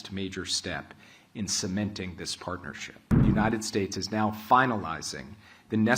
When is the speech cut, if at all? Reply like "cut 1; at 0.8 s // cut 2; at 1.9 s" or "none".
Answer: cut 1; at 3.1 s

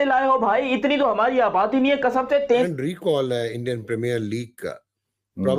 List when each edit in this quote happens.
cut 1; at 2.7 s

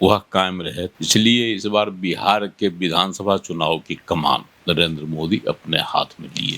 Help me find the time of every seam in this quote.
cut 1; at 0.9 s // cut 2; at 4.5 s

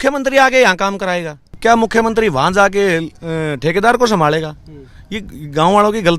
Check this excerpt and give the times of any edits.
cut 1; at 1.6 s

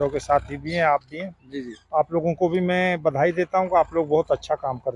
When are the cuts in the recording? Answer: none

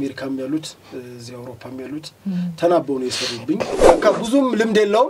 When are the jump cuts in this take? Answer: cut 1; at 3.8 s

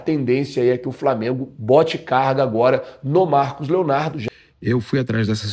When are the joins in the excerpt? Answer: cut 1; at 4.2 s

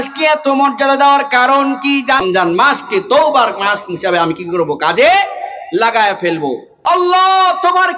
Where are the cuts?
cut 1; at 2.2 s // cut 2; at 6.7 s

